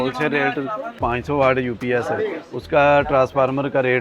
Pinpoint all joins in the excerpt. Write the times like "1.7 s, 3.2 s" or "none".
1.0 s